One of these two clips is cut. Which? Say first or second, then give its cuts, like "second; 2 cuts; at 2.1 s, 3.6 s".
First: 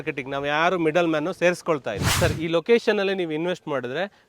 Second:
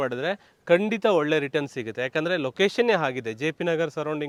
first; 1 cut; at 2.1 s